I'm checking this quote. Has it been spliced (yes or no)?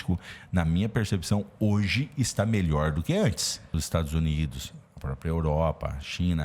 yes